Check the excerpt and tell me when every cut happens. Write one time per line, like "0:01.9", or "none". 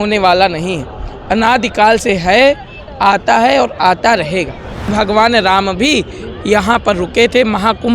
0:04.9